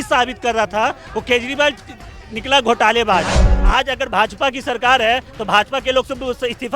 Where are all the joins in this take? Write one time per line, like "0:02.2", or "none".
0:03.5

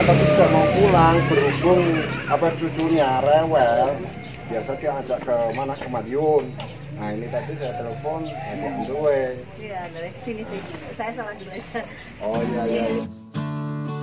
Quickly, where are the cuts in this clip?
0:13.0

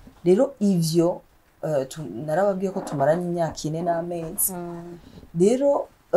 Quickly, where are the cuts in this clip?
none

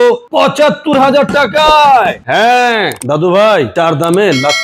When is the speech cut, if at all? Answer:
none

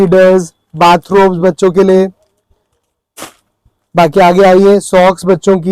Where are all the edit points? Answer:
none

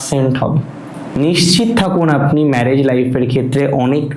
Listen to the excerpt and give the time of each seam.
none

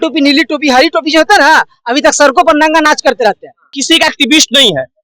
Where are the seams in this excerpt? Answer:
0:03.8

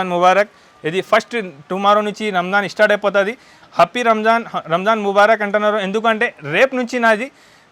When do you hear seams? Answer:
none

